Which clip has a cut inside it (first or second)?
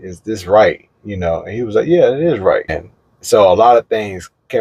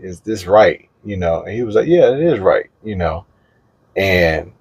first